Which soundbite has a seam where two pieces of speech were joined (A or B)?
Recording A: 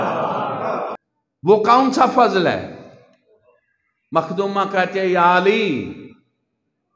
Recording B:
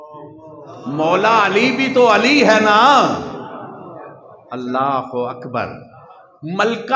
A